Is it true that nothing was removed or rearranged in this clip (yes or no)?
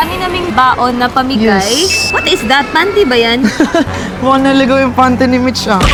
yes